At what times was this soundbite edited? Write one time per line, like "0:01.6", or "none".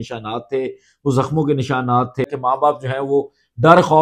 0:02.3